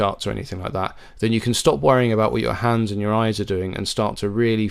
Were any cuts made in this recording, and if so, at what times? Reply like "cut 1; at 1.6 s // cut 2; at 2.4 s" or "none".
none